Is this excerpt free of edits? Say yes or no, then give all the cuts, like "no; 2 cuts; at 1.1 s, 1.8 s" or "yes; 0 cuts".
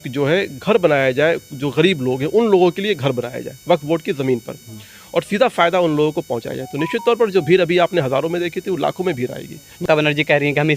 no; 1 cut; at 9.8 s